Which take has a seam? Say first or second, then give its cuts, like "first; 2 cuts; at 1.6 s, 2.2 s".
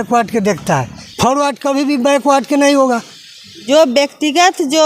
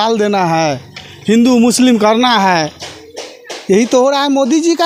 first; 2 cuts; at 1.0 s, 3.6 s